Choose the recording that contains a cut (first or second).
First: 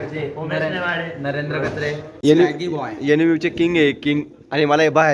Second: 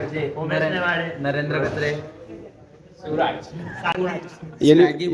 first